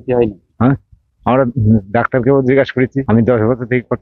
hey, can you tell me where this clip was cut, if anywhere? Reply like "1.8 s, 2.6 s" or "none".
3.0 s